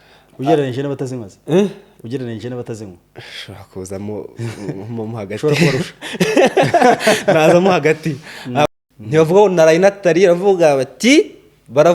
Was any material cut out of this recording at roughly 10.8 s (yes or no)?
no